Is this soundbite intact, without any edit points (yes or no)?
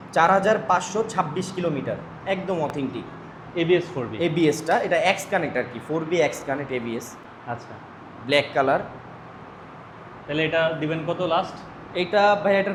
yes